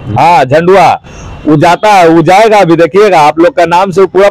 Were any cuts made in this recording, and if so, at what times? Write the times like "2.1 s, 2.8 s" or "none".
none